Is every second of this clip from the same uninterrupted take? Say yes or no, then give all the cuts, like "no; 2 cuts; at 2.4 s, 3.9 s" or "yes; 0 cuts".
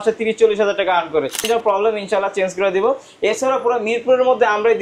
no; 1 cut; at 1.4 s